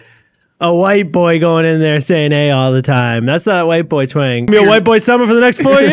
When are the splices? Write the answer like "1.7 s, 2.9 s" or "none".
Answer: 4.5 s